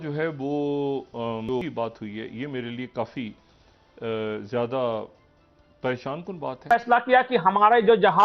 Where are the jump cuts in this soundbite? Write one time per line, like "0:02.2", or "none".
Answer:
0:01.5
0:06.7